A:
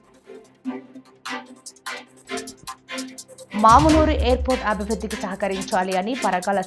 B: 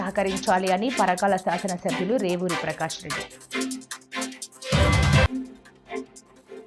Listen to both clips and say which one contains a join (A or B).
A